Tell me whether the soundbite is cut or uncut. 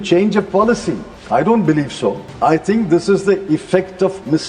cut